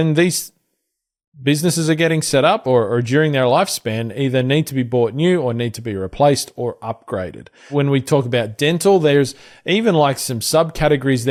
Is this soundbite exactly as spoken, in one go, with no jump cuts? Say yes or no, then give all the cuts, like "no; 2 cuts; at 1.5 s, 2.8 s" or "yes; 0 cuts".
yes; 0 cuts